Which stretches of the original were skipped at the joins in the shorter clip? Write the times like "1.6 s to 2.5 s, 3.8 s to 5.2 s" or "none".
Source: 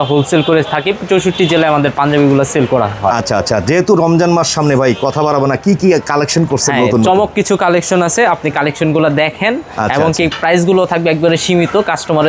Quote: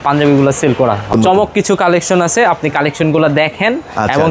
3.0 s to 6.9 s